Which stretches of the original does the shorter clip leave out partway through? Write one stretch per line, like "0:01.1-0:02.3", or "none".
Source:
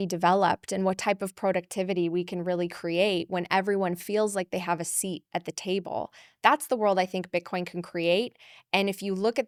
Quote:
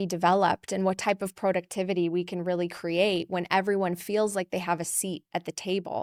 none